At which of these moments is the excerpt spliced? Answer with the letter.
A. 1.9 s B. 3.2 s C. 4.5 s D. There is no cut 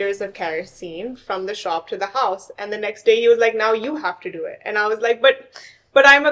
D